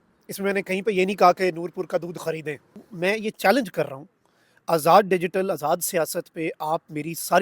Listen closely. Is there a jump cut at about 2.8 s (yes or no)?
yes